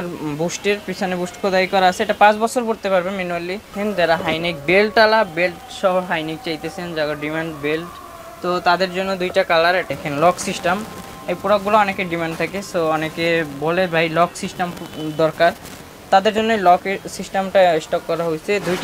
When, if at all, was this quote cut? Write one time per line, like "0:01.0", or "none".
0:03.8
0:09.9

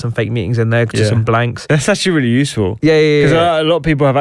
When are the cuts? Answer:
0:01.7

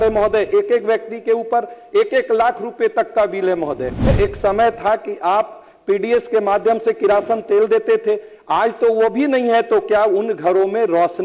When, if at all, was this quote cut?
0:04.1

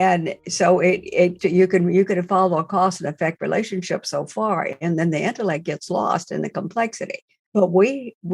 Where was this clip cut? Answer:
0:01.4
0:07.5

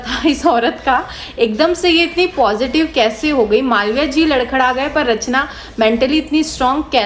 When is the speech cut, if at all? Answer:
none

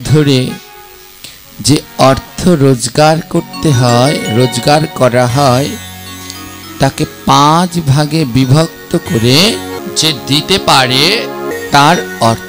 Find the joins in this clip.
0:09.8
0:11.5

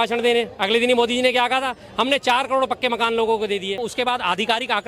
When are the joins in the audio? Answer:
0:03.9

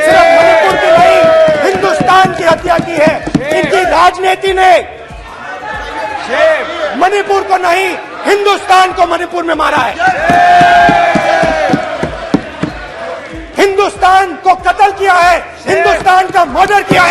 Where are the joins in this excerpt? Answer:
none

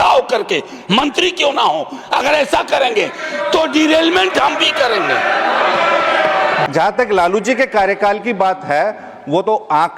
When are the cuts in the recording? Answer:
0:06.7

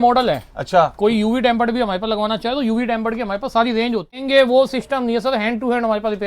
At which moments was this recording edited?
0:04.2

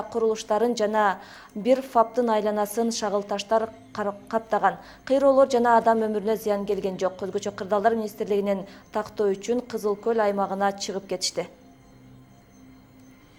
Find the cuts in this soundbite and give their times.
none

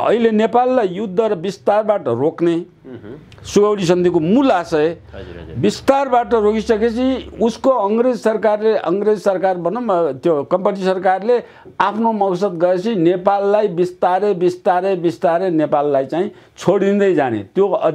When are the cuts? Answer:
none

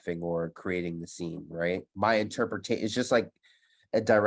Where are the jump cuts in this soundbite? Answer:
0:01.9

